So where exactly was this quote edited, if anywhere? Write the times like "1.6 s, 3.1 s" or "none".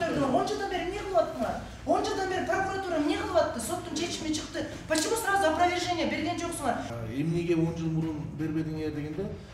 6.9 s